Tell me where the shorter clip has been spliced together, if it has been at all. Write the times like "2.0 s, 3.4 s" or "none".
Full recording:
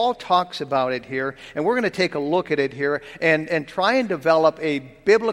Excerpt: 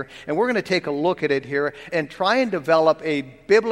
1.9 s